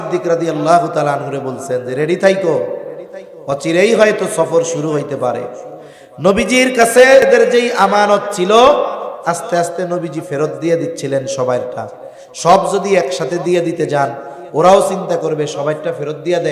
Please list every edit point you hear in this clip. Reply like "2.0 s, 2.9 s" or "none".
7.3 s